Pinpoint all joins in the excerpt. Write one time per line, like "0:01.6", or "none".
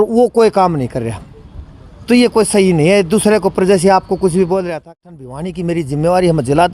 0:04.7

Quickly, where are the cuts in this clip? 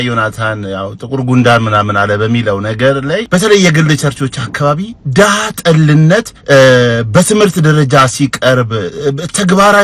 0:03.2
0:06.3

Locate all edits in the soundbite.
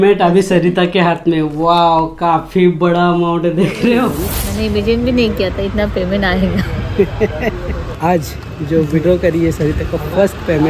0:04.4
0:07.9

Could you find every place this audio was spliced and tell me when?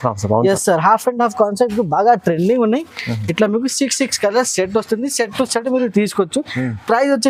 none

